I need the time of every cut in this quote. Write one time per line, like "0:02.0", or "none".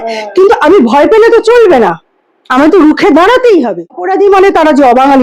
0:04.1